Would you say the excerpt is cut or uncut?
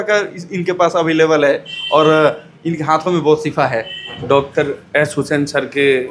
cut